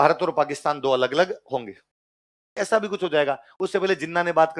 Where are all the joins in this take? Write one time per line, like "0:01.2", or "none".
0:02.6

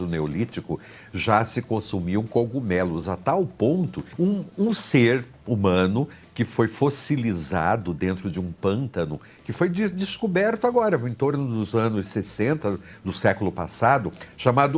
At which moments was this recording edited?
0:04.0

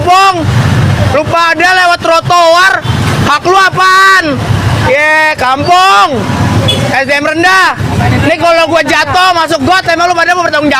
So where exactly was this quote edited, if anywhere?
none

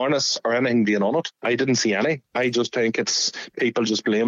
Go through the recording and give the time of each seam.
0:02.3

